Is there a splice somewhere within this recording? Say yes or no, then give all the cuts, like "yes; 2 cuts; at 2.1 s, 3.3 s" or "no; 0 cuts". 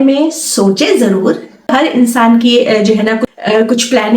yes; 2 cuts; at 1.7 s, 3.3 s